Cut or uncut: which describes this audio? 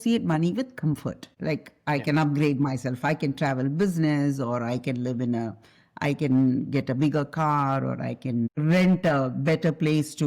cut